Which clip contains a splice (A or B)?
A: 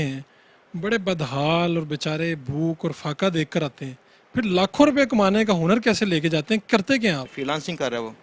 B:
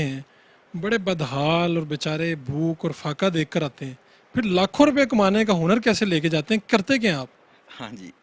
A